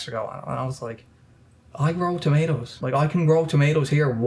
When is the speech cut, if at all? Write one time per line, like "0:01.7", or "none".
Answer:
0:02.8